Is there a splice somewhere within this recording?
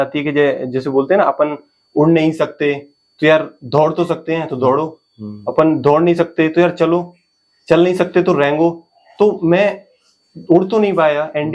no; 0 cuts

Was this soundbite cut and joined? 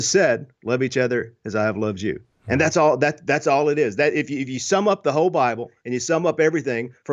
no; 0 cuts

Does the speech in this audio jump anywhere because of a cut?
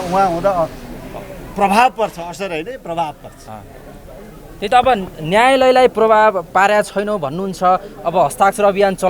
no; 0 cuts

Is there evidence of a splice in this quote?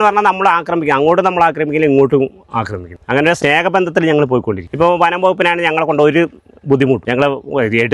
yes; 3 cuts; at 3.2 s, 4.7 s, 7.0 s

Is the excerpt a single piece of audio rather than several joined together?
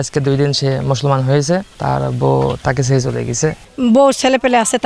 no; 2 cuts; at 1.7 s, 3.6 s

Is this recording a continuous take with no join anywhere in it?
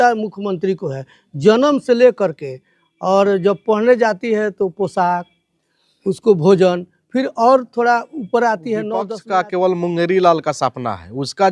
no; 1 cut; at 9.2 s

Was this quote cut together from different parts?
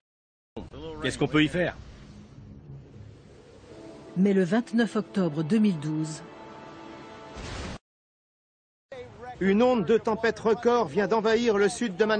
no; 0 cuts

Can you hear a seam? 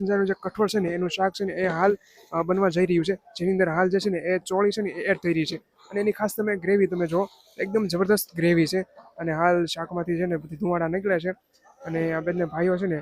no; 0 cuts

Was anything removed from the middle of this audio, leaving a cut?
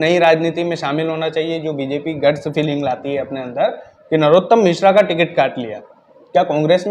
no; 0 cuts

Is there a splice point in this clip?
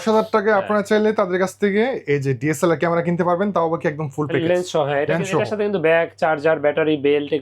no; 0 cuts

